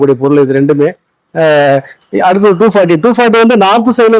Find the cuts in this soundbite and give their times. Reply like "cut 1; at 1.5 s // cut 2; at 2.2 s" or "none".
none